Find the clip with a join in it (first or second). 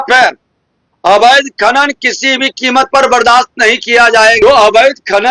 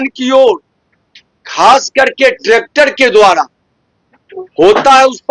first